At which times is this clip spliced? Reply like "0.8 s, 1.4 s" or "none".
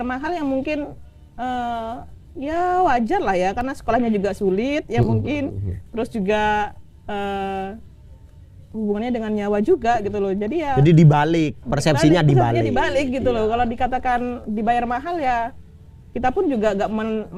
none